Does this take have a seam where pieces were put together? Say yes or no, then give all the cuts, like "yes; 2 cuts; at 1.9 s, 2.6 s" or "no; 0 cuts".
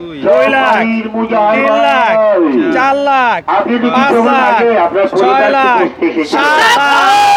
no; 0 cuts